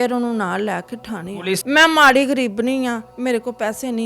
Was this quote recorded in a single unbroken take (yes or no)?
no